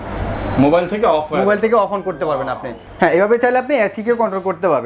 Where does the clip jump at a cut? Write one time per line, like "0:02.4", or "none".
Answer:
none